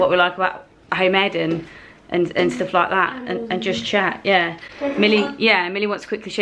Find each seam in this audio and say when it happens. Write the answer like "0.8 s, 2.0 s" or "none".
none